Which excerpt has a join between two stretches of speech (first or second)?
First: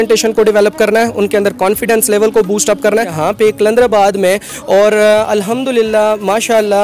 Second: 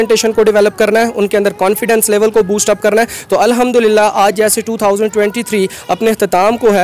first